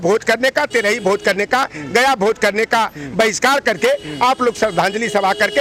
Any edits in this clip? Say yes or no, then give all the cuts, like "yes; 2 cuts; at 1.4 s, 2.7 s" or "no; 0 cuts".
no; 0 cuts